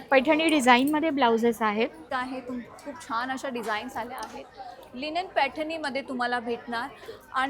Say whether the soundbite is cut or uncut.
cut